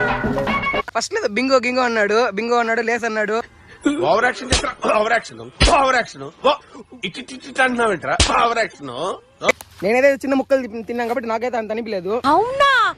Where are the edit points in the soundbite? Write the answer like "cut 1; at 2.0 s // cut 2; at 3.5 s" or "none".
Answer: cut 1; at 0.9 s // cut 2; at 9.5 s